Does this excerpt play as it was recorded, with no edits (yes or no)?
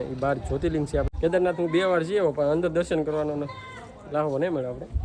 no